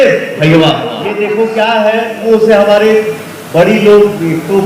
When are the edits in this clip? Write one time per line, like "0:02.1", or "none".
0:01.2